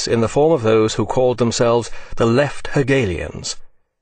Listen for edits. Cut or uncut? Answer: cut